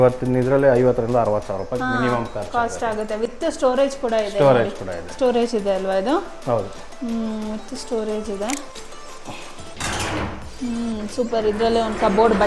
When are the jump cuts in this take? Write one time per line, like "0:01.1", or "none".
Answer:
none